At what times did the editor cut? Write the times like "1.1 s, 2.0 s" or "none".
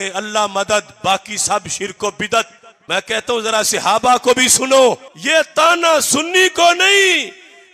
5.1 s